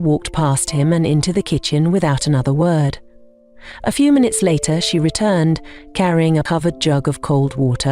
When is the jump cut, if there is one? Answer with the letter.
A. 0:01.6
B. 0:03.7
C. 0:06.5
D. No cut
C